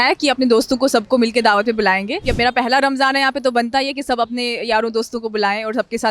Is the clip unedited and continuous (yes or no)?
no